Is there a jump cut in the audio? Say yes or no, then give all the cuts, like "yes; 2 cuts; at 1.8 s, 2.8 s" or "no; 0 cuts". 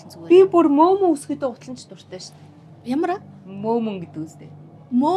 no; 0 cuts